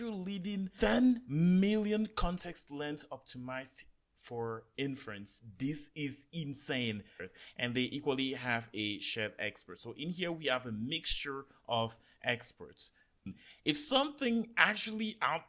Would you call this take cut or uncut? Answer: cut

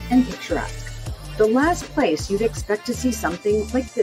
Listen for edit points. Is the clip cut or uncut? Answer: uncut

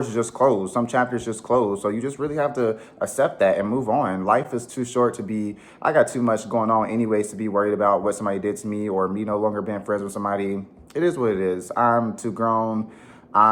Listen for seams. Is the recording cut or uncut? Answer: uncut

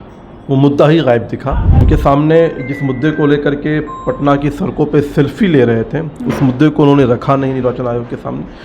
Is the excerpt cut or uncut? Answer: cut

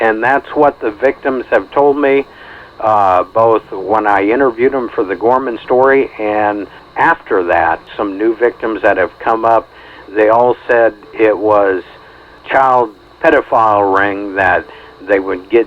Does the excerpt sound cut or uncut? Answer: cut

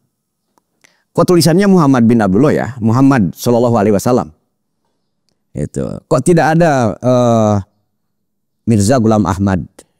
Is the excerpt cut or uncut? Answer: uncut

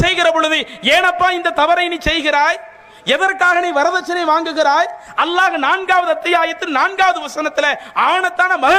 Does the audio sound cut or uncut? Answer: uncut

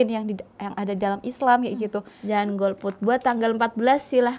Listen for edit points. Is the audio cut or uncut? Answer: cut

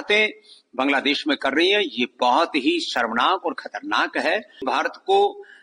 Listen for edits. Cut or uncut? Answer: cut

